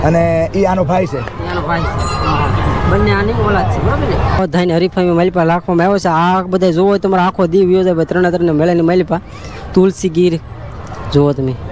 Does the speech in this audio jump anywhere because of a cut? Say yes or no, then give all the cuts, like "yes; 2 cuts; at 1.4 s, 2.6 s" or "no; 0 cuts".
yes; 1 cut; at 4.4 s